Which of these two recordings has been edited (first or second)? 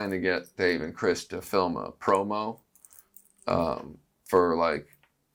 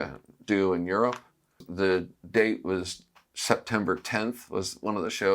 second